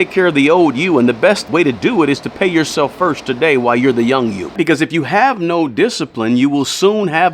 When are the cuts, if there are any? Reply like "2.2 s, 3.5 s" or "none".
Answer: 1.4 s, 4.4 s